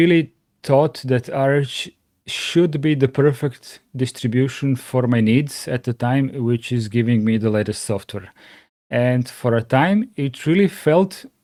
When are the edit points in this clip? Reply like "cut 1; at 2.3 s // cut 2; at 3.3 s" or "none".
none